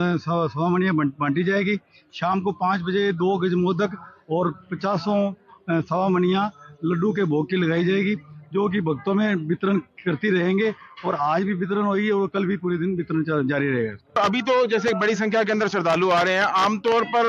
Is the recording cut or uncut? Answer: cut